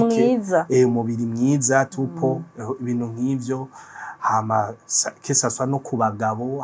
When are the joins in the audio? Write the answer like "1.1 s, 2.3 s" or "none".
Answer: none